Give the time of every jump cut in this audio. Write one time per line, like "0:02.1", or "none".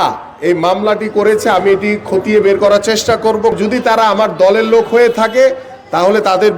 0:03.6